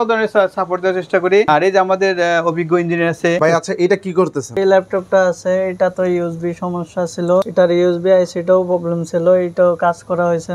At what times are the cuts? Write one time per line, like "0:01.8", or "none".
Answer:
0:01.5
0:03.4
0:04.6
0:07.5